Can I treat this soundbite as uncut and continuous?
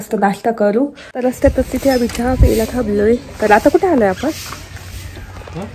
no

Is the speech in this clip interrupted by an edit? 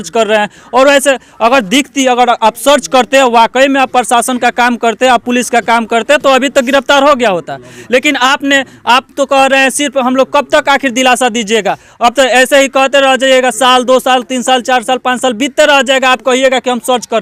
no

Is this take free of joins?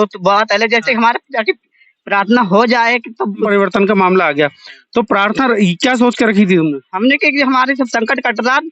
no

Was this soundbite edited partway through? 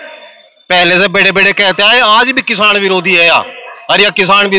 no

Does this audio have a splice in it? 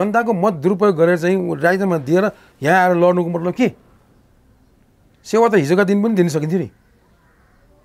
no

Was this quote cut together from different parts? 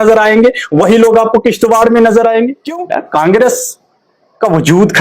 yes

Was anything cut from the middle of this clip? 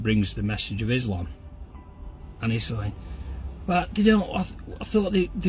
no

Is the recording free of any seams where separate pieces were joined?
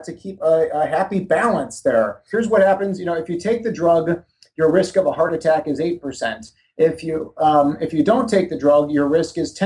no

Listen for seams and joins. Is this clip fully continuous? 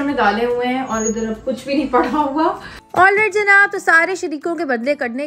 no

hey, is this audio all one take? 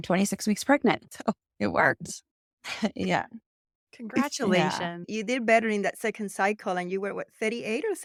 yes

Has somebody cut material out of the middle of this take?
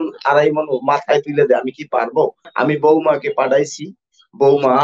yes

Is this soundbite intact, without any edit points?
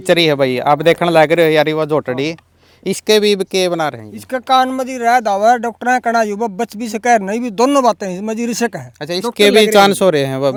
yes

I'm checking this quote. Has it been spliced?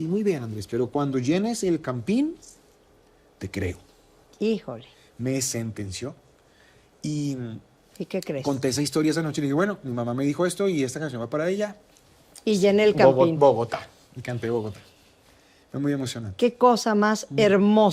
no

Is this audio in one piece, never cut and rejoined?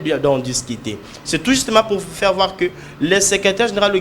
yes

